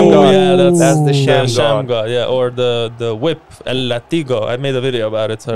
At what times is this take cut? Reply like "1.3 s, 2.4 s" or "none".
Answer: none